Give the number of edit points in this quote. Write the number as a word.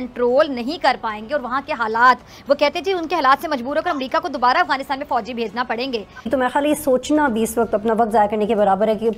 one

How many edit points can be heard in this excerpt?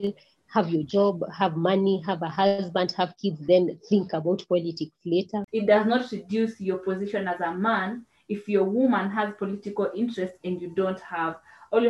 one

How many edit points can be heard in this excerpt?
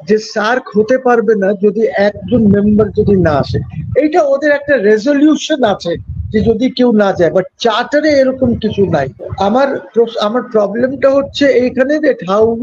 one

